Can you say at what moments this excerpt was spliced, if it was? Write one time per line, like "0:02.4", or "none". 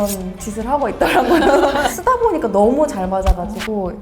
0:01.9